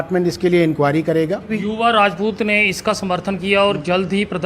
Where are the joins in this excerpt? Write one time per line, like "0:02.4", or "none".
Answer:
0:01.5